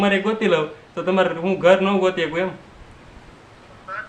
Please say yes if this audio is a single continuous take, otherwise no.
yes